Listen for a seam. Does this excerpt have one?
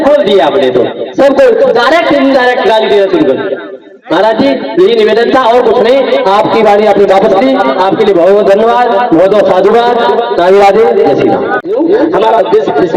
no; 0 cuts

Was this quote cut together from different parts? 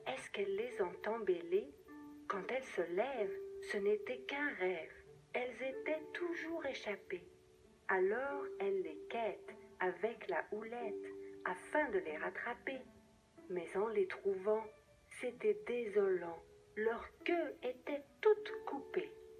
no; 0 cuts

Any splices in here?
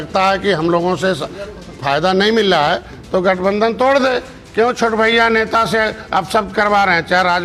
no; 0 cuts

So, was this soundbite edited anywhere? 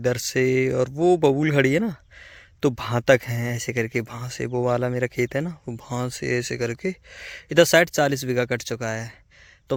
no; 0 cuts

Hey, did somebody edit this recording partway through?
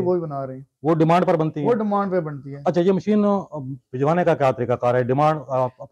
no; 0 cuts

